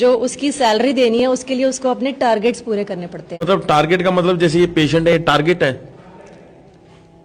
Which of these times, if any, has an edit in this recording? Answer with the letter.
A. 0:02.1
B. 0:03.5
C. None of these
B